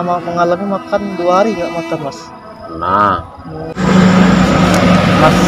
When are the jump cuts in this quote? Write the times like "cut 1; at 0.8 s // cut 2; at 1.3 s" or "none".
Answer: cut 1; at 3.8 s